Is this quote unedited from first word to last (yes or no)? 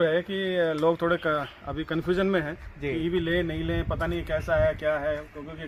yes